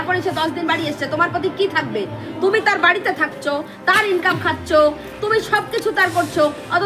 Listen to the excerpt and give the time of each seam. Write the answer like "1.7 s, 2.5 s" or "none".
none